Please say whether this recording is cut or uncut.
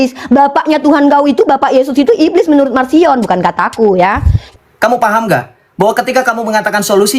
cut